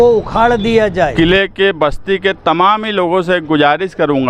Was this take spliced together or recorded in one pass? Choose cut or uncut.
cut